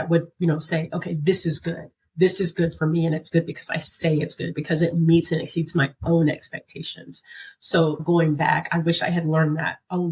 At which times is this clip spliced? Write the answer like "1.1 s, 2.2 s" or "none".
8.0 s